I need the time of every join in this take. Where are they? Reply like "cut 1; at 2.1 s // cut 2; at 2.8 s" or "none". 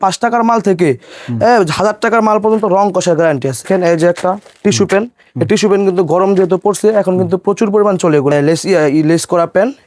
cut 1; at 3.7 s // cut 2; at 8.3 s